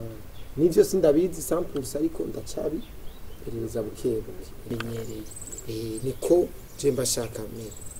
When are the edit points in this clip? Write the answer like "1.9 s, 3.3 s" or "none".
4.7 s